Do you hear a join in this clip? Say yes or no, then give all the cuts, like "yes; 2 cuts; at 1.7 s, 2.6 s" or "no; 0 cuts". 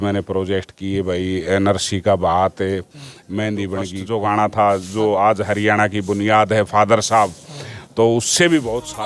yes; 1 cut; at 4.0 s